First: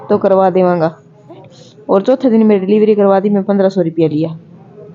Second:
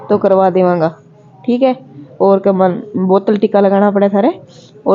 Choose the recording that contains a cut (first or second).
first